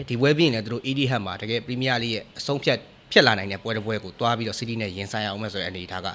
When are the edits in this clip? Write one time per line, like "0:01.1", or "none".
none